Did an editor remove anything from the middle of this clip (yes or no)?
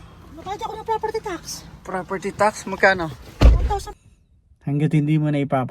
yes